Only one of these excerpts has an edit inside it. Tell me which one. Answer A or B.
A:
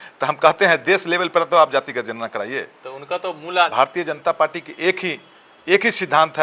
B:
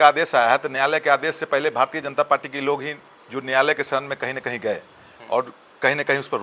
A